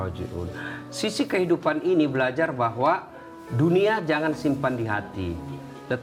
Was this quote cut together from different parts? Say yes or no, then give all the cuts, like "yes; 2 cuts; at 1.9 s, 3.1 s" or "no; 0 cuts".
no; 0 cuts